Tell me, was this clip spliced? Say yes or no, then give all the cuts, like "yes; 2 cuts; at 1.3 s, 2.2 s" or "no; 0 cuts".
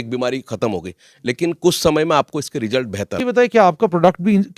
yes; 1 cut; at 3.2 s